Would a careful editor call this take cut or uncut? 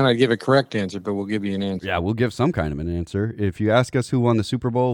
uncut